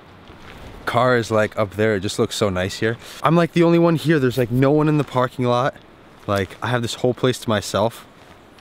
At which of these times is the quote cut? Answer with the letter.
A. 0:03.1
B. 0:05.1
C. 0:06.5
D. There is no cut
A